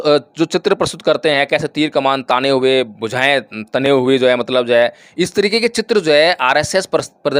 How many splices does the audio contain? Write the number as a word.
zero